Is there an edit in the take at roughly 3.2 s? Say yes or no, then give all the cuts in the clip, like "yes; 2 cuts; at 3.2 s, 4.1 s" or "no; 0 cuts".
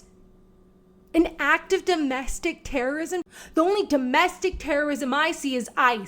yes; 1 cut; at 3.2 s